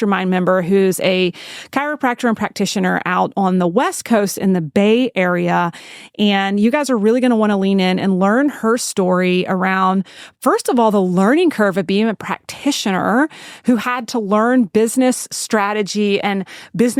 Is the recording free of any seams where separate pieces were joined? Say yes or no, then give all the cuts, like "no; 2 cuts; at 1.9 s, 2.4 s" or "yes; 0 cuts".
yes; 0 cuts